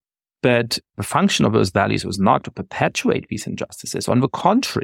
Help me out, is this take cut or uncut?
uncut